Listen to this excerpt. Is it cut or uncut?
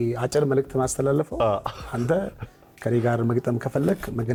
uncut